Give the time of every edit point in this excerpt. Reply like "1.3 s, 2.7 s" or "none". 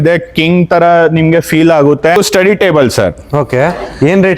2.2 s